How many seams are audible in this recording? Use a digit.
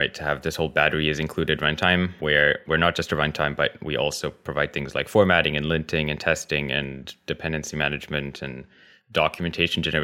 0